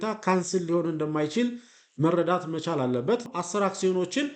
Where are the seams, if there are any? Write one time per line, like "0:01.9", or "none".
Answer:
0:03.2

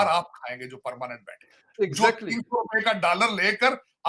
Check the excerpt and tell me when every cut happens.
0:01.7

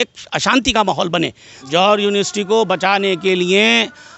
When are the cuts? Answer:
0:01.5

